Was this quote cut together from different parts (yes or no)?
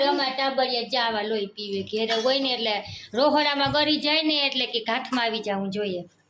no